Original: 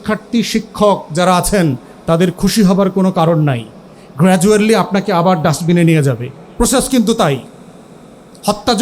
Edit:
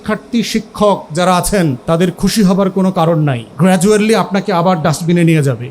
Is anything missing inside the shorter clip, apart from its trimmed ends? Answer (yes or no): yes